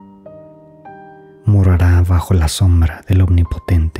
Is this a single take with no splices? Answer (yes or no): no